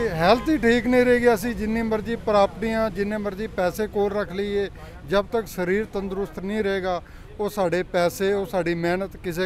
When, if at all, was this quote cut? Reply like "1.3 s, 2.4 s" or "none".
none

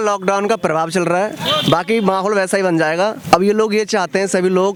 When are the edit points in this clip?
none

